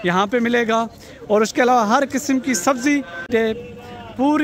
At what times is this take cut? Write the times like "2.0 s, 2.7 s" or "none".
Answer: 3.3 s